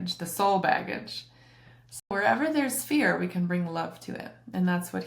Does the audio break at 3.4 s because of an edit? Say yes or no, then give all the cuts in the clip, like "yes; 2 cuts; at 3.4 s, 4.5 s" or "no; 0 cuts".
no; 1 cut; at 2.1 s